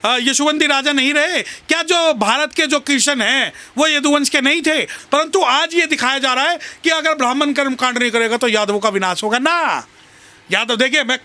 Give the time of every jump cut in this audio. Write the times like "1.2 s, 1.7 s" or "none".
4.9 s